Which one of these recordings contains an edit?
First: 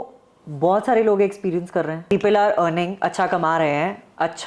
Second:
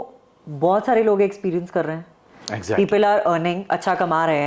first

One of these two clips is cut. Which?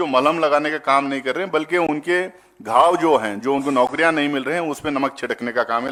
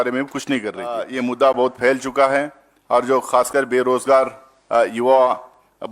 second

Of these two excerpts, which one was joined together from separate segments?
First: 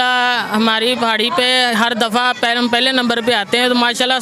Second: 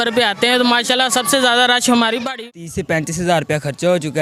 second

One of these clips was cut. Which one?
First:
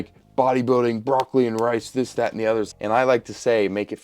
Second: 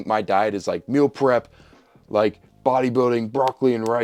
first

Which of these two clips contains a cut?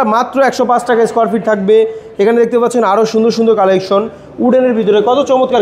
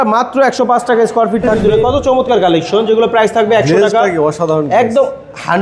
second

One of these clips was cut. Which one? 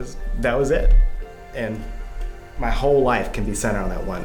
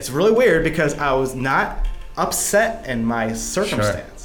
first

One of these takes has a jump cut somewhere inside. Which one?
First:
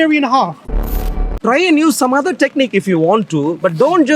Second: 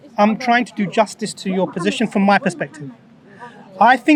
first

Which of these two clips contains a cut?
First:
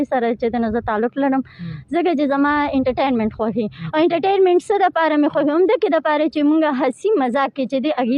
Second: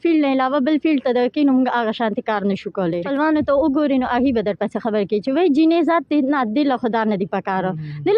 second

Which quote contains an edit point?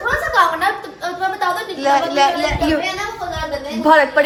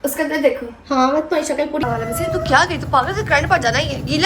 second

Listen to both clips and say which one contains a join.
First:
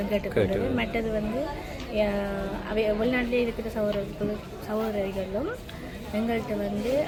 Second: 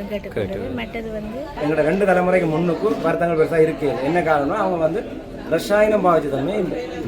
second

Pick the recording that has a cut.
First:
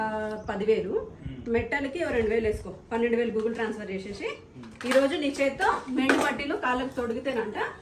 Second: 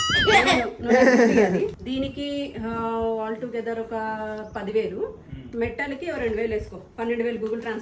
second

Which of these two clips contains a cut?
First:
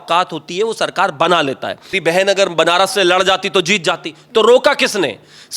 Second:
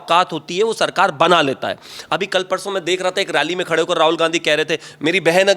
first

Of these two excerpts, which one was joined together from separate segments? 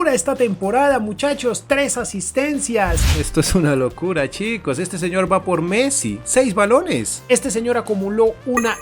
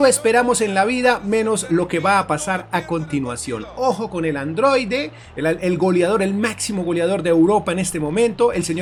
first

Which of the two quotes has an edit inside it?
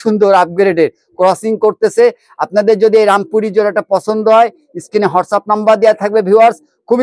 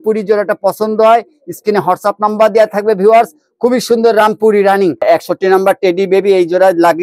second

